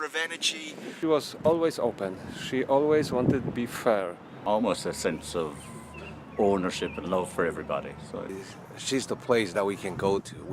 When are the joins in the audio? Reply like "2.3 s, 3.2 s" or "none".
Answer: 1.0 s, 4.3 s, 8.3 s